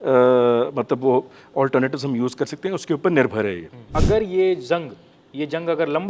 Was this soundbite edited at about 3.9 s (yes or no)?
yes